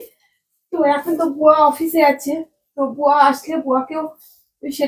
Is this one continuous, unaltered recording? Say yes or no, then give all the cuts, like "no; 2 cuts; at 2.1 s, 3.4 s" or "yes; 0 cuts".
yes; 0 cuts